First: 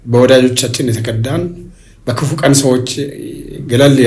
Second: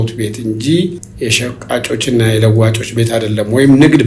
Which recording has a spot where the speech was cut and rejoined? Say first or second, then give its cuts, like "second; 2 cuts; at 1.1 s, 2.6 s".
second; 1 cut; at 1.0 s